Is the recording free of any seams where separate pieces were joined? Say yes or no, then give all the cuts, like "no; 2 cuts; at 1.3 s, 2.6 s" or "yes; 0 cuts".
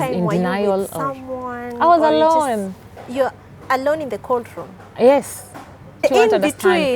no; 1 cut; at 6.0 s